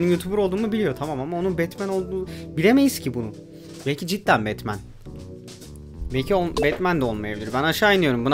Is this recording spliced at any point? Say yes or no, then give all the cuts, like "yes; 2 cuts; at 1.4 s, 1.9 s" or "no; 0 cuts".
no; 0 cuts